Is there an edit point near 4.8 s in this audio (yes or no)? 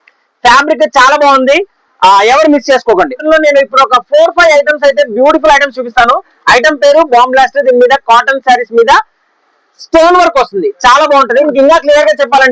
no